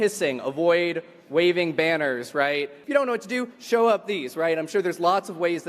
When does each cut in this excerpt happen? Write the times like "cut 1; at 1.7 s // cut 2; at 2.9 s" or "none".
cut 1; at 2.8 s

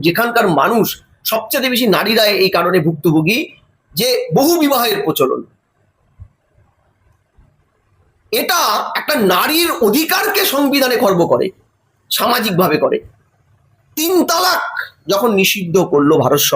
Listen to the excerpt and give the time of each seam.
cut 1; at 13.2 s

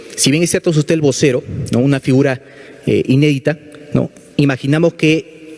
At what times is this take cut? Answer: none

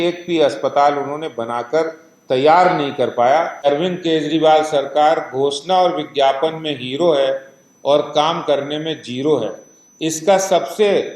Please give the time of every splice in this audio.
cut 1; at 3.6 s

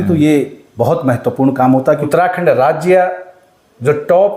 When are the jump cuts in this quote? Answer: cut 1; at 1.9 s

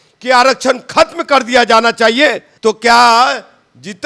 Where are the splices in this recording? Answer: cut 1; at 2.5 s

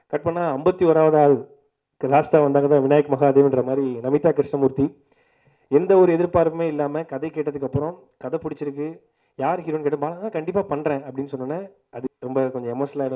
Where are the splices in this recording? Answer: cut 1; at 12.0 s

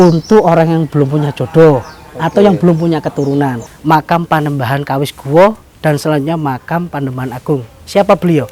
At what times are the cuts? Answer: cut 1; at 3.7 s

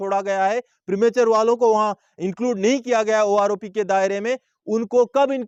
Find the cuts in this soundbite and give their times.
none

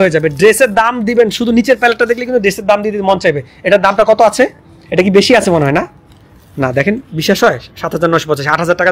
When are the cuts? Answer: none

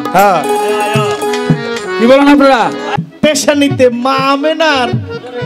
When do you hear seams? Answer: cut 1; at 2.9 s

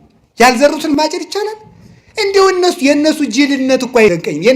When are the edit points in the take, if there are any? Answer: cut 1; at 1.0 s

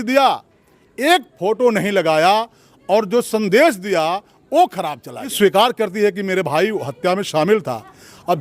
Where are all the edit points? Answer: cut 1; at 5.3 s

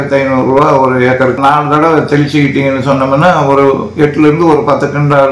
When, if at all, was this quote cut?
cut 1; at 1.4 s

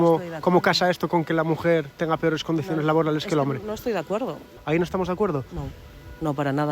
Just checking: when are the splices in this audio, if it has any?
cut 1; at 4.5 s

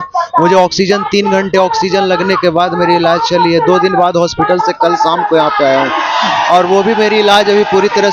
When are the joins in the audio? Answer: none

